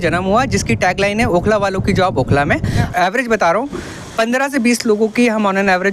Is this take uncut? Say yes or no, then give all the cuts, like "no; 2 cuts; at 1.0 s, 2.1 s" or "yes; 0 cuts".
no; 1 cut; at 2.9 s